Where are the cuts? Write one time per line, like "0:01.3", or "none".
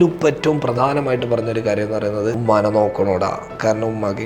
0:02.4